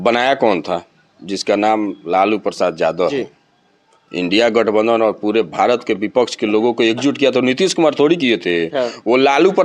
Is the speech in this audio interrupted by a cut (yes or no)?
no